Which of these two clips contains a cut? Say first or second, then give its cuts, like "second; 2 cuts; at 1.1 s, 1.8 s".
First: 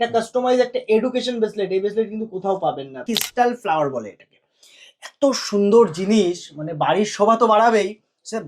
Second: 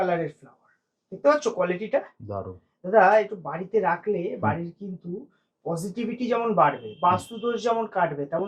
first; 1 cut; at 3.0 s